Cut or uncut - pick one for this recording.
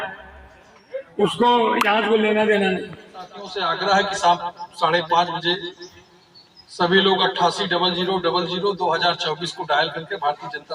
cut